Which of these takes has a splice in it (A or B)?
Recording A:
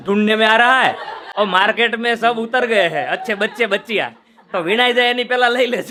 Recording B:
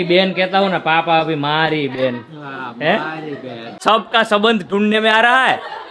B